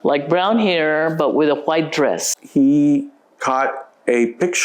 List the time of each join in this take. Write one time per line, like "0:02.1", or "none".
0:02.4